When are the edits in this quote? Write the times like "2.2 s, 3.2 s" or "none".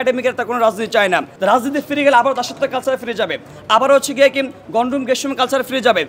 1.3 s